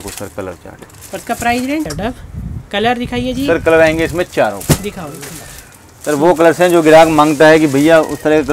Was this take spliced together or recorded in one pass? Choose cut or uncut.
cut